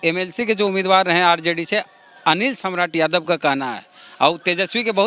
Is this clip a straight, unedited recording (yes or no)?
yes